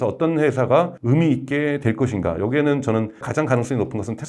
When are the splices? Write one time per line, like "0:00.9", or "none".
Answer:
none